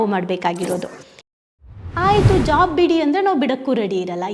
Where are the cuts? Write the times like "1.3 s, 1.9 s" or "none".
1.6 s